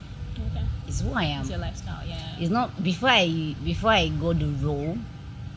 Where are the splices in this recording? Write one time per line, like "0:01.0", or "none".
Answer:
none